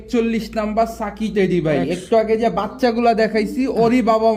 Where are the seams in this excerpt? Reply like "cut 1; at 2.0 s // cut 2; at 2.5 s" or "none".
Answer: none